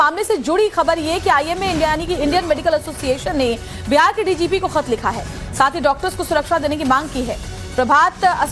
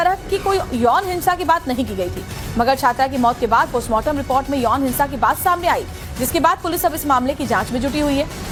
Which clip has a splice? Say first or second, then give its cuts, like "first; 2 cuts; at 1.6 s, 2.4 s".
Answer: first; 1 cut; at 1.6 s